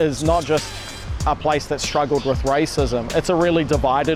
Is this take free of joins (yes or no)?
yes